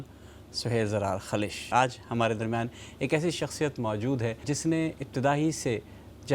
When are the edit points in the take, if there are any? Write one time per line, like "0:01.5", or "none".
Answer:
0:01.7
0:04.4